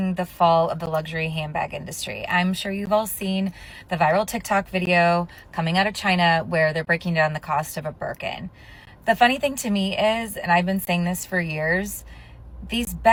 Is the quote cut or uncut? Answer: uncut